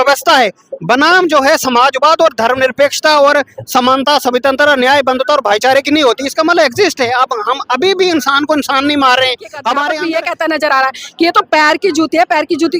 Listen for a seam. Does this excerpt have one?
yes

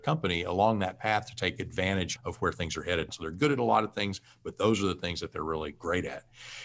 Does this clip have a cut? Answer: yes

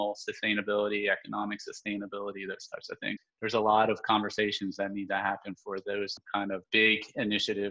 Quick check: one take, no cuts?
no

